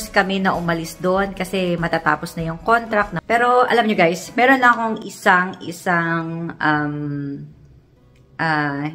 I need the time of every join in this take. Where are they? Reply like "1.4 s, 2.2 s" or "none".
3.2 s